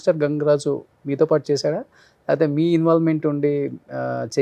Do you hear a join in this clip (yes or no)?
no